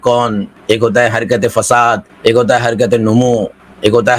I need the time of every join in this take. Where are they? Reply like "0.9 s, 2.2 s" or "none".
none